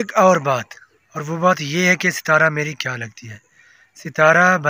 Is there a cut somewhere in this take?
no; 0 cuts

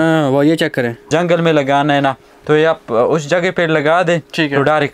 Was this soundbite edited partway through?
yes; 1 cut; at 1.0 s

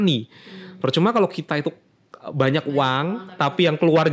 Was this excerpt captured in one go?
yes; 0 cuts

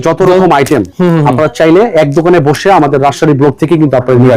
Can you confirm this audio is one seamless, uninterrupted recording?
yes; 0 cuts

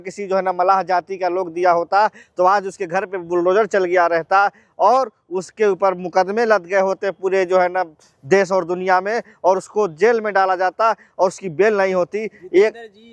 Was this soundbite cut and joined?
no; 0 cuts

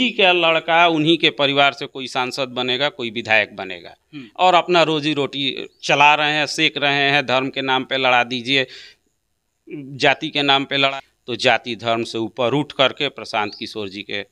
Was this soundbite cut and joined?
yes; 1 cut; at 10.9 s

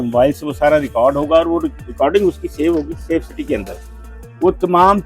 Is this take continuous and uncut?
yes; 0 cuts

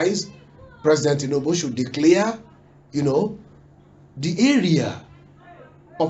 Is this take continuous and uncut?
yes; 0 cuts

